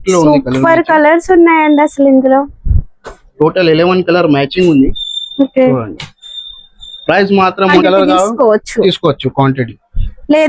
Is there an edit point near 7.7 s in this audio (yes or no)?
yes